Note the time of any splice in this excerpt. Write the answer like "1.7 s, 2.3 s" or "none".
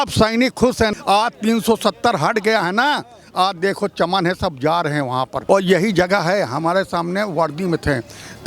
0.9 s, 5.4 s